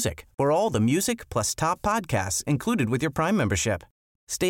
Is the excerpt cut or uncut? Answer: uncut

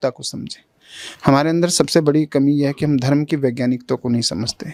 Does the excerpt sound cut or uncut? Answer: uncut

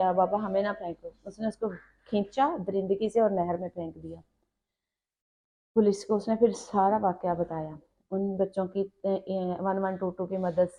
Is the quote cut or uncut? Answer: uncut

